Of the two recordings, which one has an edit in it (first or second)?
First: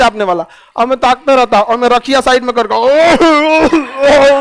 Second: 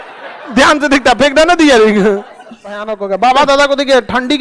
second